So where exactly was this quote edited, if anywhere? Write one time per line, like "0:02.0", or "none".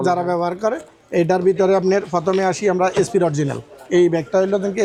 none